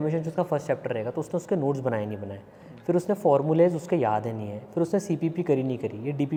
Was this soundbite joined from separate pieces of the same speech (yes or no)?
no